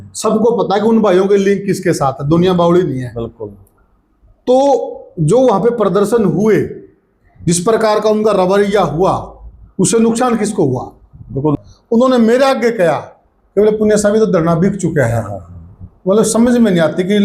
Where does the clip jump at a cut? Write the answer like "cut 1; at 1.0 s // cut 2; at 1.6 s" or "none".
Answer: cut 1; at 11.6 s

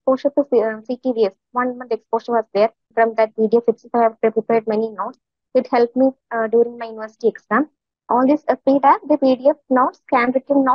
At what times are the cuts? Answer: cut 1; at 2.9 s // cut 2; at 7.9 s

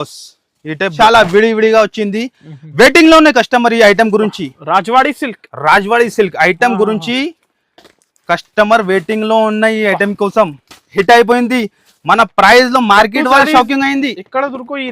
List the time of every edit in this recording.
cut 1; at 0.9 s // cut 2; at 10.9 s

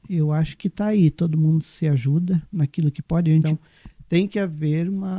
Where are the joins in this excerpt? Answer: cut 1; at 3.5 s

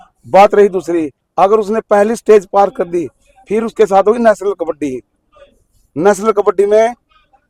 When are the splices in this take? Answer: none

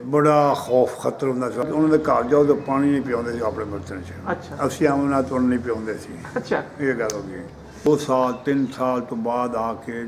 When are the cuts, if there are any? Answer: cut 1; at 1.7 s // cut 2; at 7.9 s

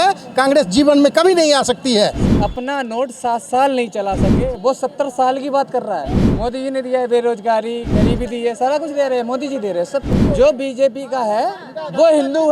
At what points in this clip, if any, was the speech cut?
cut 1; at 2.2 s // cut 2; at 6.2 s // cut 3; at 10.2 s

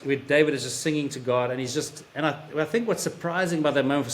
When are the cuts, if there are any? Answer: none

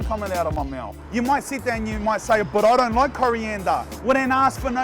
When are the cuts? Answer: cut 1; at 1.0 s // cut 2; at 3.9 s

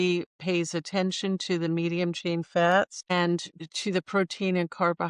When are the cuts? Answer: cut 1; at 3.6 s

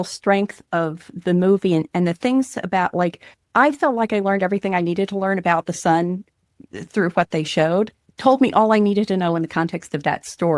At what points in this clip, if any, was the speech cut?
cut 1; at 8.0 s

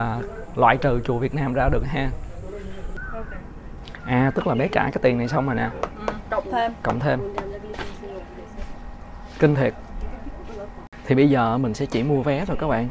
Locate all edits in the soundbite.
cut 1; at 2.9 s // cut 2; at 10.8 s

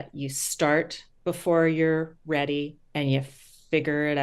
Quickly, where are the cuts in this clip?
cut 1; at 1.0 s // cut 2; at 2.8 s

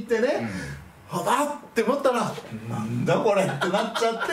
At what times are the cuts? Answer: none

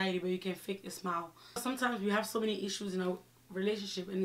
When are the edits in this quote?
cut 1; at 1.6 s

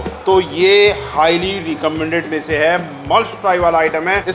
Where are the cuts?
none

